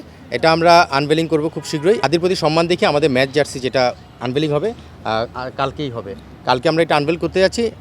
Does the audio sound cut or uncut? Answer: cut